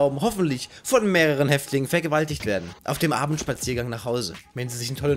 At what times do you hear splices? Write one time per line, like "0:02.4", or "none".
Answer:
none